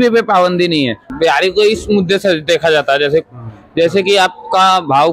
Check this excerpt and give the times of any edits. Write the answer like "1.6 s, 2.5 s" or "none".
1.1 s